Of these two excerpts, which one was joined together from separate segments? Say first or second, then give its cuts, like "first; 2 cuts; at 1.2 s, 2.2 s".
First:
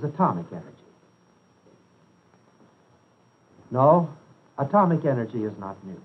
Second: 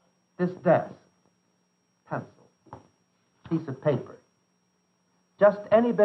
second; 1 cut; at 4.8 s